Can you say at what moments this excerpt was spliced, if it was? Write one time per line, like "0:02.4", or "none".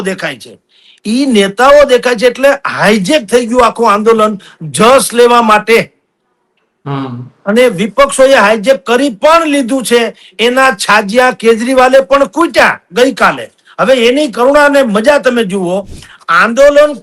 none